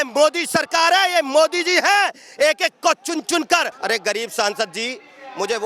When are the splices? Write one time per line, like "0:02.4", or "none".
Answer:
0:03.7